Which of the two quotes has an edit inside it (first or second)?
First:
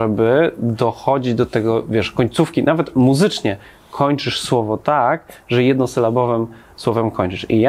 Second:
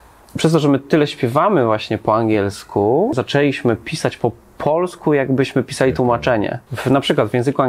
second